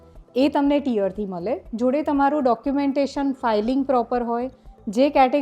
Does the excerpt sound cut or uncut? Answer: uncut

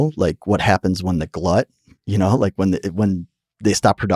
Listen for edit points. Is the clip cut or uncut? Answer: uncut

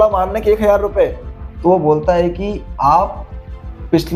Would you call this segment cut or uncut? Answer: uncut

